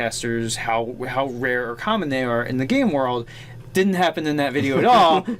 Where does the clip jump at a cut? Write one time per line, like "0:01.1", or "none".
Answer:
0:04.5